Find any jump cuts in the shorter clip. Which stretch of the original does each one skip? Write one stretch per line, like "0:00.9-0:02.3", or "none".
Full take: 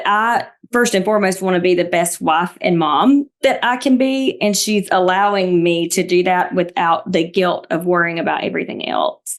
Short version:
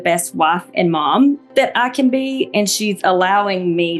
none